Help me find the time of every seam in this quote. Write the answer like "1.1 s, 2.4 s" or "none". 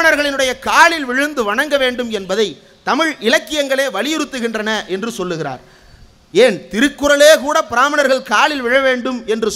none